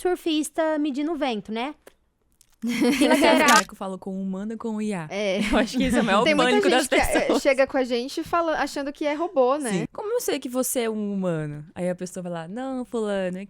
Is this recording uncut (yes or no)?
no